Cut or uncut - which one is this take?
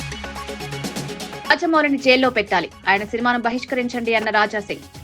cut